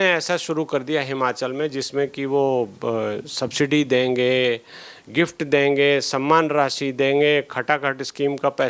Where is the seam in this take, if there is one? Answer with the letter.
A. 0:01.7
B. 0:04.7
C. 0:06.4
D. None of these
D